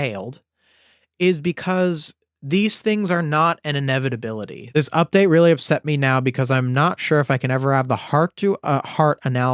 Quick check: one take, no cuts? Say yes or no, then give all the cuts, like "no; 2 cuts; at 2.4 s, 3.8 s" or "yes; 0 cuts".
no; 1 cut; at 4.6 s